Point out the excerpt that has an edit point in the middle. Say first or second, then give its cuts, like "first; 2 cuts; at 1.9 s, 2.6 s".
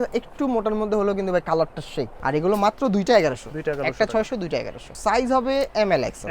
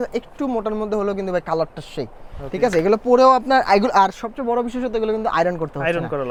first; 2 cuts; at 2.1 s, 4.8 s